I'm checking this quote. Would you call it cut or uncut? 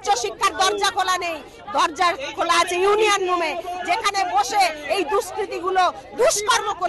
uncut